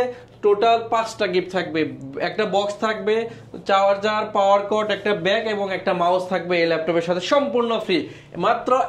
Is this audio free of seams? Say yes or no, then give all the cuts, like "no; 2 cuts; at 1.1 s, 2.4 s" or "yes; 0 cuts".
yes; 0 cuts